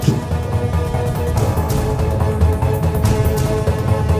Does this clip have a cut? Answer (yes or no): no